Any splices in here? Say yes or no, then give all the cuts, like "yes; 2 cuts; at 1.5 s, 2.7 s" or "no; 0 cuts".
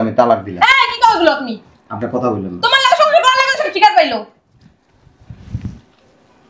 no; 0 cuts